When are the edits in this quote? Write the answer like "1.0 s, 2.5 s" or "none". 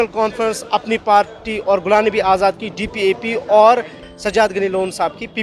4.0 s